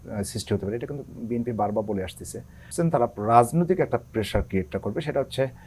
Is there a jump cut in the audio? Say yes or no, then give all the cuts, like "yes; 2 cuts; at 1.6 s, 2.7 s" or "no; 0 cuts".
yes; 1 cut; at 2.7 s